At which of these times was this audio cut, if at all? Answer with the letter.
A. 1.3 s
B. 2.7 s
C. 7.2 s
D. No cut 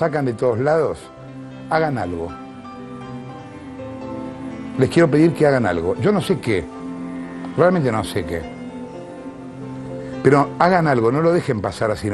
D